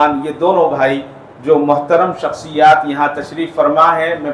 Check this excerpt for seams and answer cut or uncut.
uncut